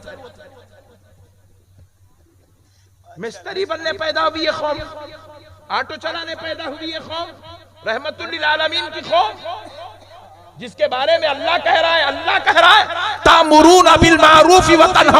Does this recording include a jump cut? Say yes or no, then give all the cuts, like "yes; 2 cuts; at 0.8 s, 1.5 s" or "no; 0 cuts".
no; 0 cuts